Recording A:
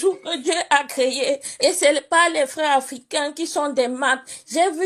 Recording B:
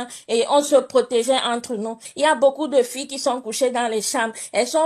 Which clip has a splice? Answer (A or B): B